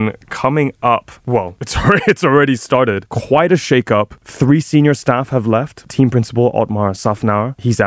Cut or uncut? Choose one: cut